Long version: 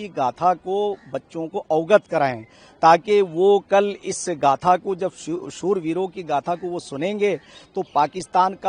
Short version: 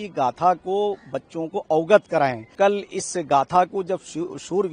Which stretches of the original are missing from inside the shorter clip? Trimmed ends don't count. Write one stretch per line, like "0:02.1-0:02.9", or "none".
0:02.5-0:03.6